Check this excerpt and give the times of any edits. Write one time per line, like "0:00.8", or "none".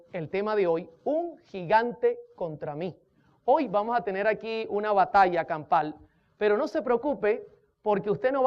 0:05.1